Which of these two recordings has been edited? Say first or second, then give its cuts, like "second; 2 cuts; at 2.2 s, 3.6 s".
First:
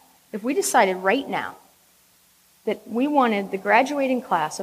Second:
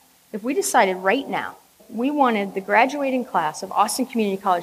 second; 1 cut; at 1.9 s